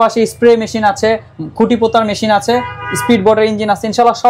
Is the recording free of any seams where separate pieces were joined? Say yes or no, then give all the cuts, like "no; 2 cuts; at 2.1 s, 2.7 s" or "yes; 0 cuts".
yes; 0 cuts